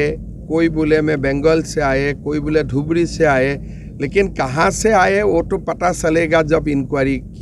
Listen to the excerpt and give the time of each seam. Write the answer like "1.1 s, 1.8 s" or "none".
none